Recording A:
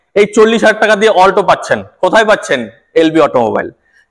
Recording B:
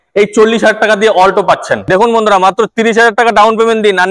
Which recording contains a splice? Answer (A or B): B